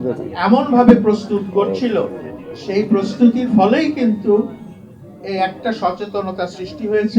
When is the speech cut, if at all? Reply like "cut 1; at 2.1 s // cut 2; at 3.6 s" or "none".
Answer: none